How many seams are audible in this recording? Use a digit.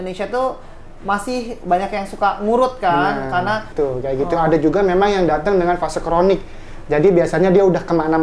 1